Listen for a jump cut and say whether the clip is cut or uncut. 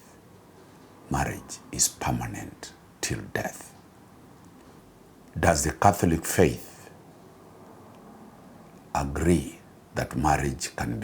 cut